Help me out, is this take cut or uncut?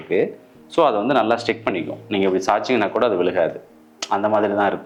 uncut